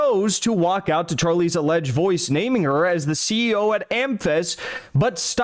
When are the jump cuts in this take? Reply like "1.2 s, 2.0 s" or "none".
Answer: none